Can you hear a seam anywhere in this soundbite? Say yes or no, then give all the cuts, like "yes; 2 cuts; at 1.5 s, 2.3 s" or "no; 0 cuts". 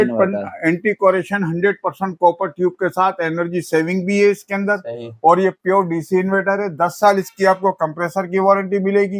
no; 0 cuts